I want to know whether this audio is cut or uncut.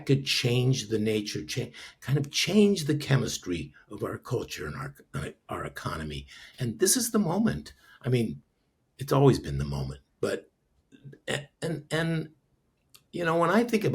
uncut